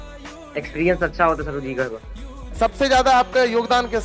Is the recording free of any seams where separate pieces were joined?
no; 1 cut; at 2.5 s

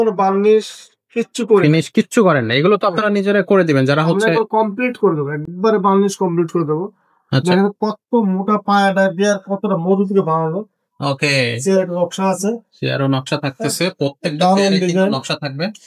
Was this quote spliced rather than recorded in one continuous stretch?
no; 0 cuts

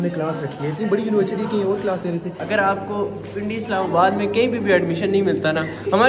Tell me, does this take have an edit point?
yes; 1 cut; at 2.4 s

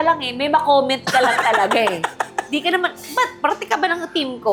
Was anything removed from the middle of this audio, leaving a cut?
no; 0 cuts

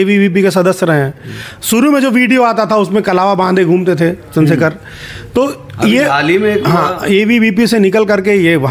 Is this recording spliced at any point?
no; 0 cuts

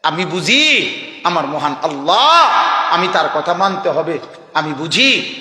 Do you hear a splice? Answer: no; 0 cuts

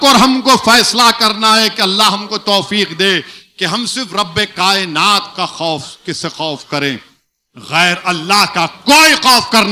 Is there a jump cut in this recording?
no; 0 cuts

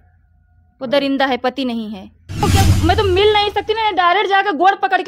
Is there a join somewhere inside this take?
yes; 1 cut; at 2.4 s

